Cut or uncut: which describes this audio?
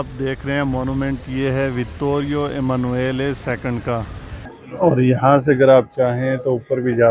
cut